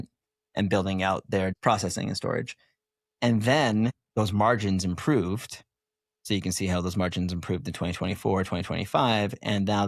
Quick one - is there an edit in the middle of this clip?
yes; 2 cuts; at 1.5 s, 3.9 s

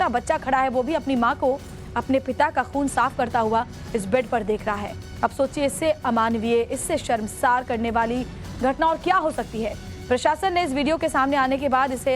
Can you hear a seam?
yes; 1 cut; at 10.4 s

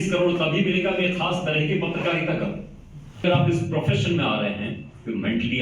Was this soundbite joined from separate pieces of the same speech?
yes; 1 cut; at 3.2 s

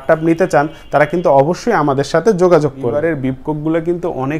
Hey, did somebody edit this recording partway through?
yes; 1 cut; at 2.9 s

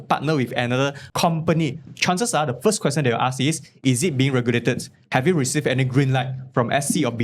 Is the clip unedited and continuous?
no; 1 cut; at 1.0 s

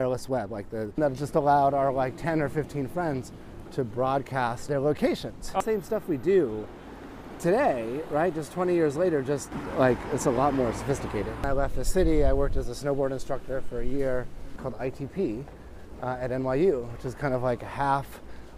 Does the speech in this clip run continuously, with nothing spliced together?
no; 5 cuts; at 1.0 s, 4.6 s, 5.6 s, 11.4 s, 14.5 s

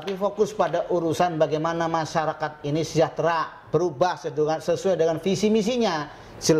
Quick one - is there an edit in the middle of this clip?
no; 0 cuts

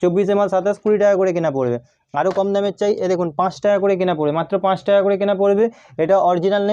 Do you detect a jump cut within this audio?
no; 0 cuts

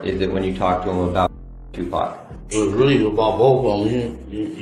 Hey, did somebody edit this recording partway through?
no; 0 cuts

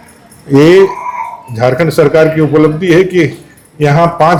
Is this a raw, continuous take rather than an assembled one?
yes; 0 cuts

